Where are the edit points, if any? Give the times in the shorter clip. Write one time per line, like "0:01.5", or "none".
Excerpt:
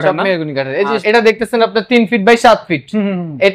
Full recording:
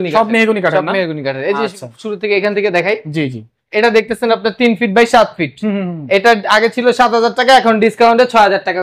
0:01.0